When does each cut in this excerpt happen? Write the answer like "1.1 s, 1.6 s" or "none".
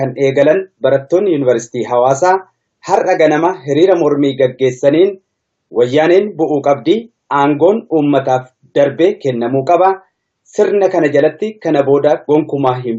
none

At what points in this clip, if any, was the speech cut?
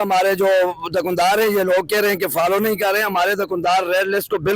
none

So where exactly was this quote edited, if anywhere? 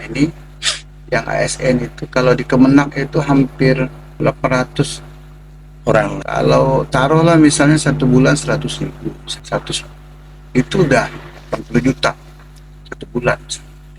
4.2 s, 6.2 s, 9.3 s

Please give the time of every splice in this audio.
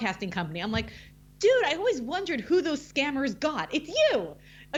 none

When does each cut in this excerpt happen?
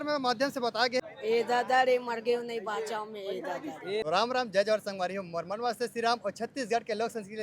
1.1 s, 4.0 s

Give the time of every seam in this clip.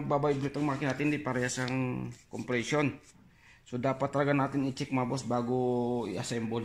none

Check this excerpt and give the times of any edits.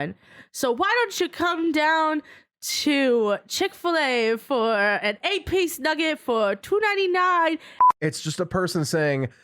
7.8 s

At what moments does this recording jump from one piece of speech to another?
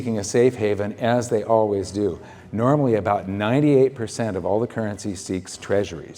none

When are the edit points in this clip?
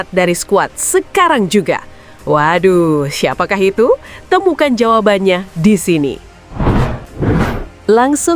6.3 s

